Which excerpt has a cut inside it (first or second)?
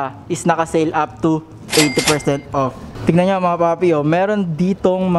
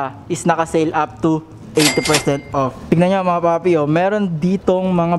second